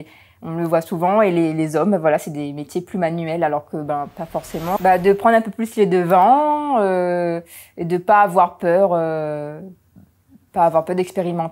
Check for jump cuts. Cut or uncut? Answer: cut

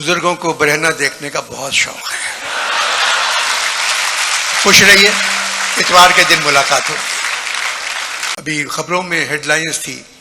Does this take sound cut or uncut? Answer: cut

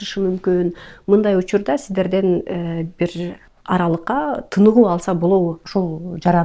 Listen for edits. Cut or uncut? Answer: cut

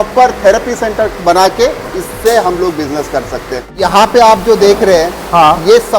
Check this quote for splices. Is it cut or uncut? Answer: cut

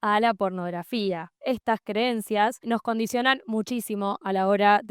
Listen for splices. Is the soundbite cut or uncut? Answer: cut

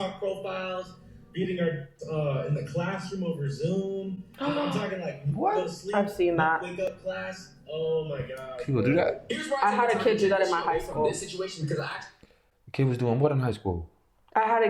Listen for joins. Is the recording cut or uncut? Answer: uncut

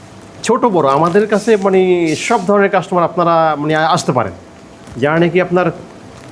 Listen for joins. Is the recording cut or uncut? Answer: uncut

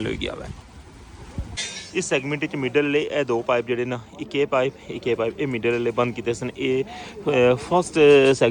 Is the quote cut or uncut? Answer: cut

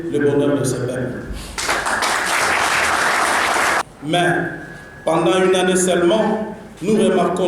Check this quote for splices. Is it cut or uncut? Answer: cut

